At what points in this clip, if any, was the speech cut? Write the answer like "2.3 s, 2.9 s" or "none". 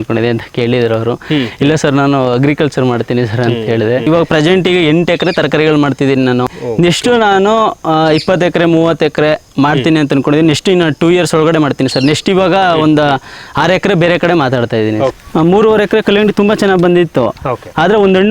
4.1 s, 6.6 s, 15.1 s